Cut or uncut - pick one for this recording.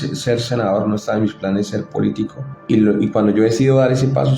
cut